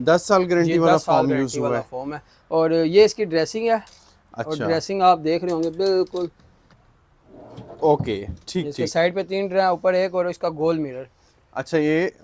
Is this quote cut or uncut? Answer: uncut